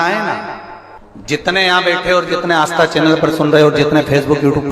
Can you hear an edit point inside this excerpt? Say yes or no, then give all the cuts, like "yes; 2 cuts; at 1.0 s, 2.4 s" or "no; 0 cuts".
no; 0 cuts